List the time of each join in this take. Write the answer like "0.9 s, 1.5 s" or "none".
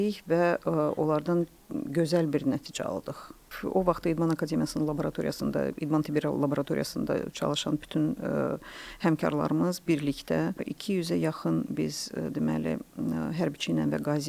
3.4 s